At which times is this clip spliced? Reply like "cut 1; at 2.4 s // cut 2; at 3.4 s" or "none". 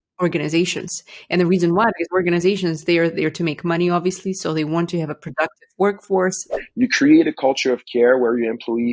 cut 1; at 6.5 s